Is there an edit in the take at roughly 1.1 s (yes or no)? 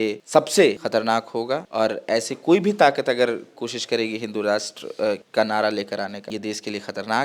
yes